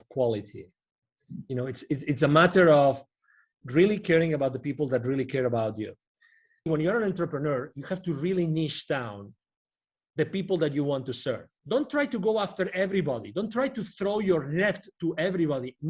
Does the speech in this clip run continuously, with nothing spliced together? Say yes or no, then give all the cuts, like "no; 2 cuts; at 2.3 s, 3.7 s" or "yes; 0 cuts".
no; 2 cuts; at 6.7 s, 11.5 s